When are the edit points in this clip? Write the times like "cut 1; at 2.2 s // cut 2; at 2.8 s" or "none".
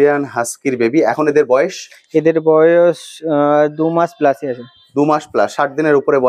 none